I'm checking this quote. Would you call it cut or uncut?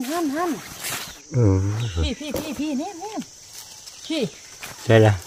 cut